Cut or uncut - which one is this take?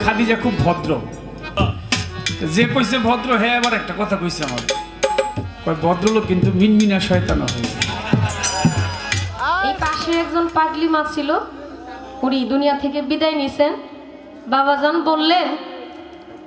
cut